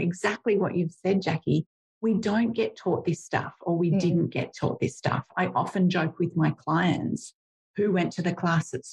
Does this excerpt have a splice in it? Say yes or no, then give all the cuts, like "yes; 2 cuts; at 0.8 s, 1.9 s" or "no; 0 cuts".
no; 0 cuts